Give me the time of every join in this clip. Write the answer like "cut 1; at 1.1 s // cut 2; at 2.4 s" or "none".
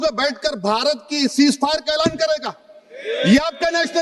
none